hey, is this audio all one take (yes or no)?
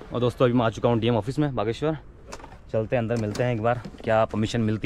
yes